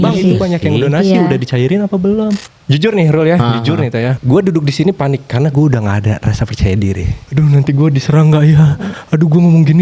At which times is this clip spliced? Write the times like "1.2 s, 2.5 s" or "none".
2.5 s, 4.2 s, 7.2 s